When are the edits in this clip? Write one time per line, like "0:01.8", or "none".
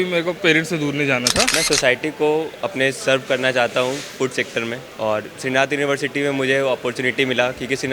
0:01.5
0:04.8